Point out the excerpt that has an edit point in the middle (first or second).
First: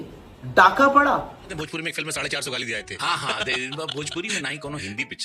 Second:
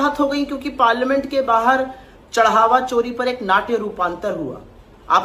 first